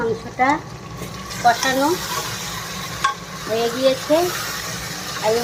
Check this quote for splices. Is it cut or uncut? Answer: uncut